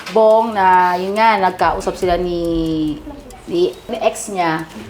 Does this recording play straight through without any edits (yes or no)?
no